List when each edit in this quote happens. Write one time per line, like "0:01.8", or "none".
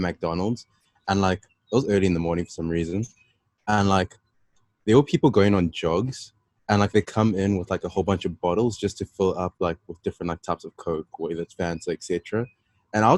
none